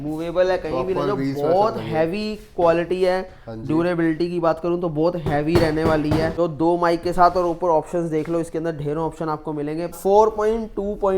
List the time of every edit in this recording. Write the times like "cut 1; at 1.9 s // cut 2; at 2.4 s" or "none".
cut 1; at 6.3 s // cut 2; at 10.0 s